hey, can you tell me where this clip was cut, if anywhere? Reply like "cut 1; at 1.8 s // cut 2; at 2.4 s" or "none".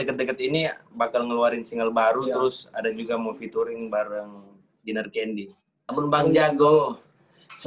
cut 1; at 5.8 s